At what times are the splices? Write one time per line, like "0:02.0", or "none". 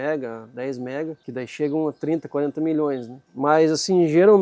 0:01.2
0:03.2